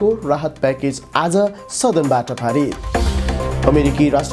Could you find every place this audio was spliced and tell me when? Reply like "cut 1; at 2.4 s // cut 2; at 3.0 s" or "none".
cut 1; at 2.8 s